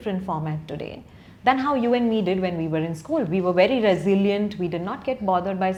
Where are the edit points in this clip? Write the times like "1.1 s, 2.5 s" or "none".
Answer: none